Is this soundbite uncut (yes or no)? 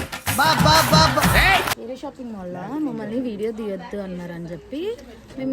no